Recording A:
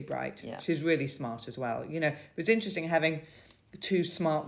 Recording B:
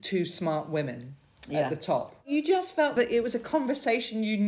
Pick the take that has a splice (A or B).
B